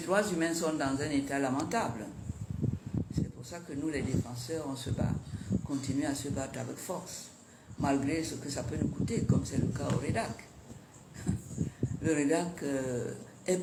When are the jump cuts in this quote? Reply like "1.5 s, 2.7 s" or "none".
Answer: none